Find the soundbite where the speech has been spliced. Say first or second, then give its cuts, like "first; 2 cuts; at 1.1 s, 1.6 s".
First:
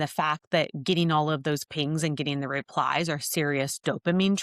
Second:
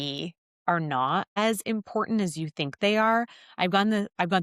second; 1 cut; at 1.3 s